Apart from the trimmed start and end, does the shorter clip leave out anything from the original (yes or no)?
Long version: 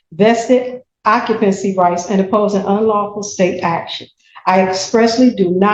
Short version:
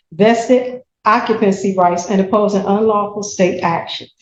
no